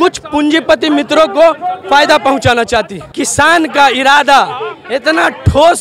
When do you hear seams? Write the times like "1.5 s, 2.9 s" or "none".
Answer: 3.0 s